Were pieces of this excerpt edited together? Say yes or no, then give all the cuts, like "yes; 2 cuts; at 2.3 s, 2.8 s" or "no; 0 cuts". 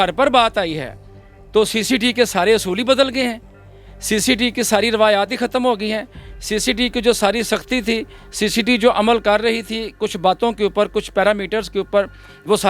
no; 0 cuts